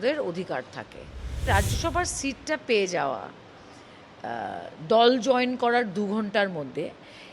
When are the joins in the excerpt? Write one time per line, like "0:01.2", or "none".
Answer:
0:01.4